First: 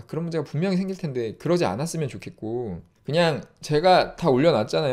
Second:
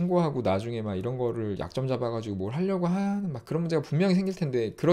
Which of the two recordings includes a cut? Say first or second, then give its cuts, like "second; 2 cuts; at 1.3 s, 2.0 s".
first; 1 cut; at 2.9 s